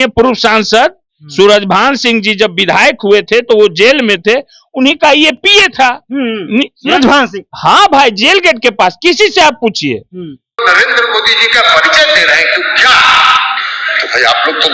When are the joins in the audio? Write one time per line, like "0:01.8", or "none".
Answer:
0:10.6